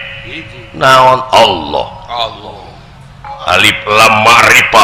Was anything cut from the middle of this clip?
yes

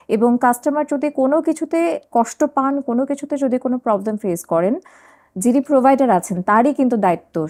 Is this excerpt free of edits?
yes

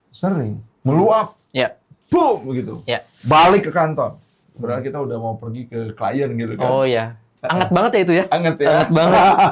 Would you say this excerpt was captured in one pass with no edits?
yes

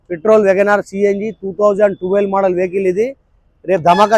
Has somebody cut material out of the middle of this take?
no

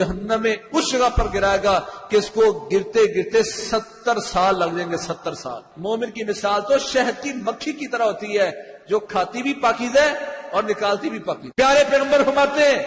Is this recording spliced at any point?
yes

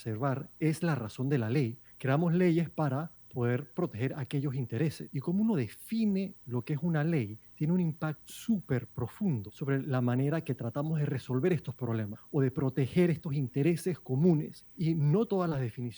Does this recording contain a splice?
yes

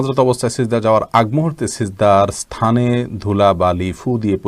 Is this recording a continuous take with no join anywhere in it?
yes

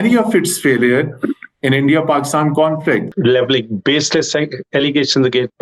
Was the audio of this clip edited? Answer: yes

